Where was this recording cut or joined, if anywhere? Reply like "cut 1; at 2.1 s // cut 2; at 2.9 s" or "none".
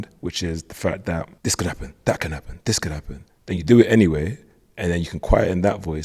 cut 1; at 1.3 s